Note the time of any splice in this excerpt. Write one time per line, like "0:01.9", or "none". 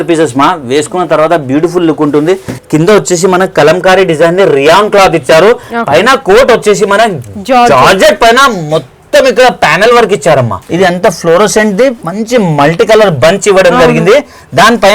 0:02.6
0:10.6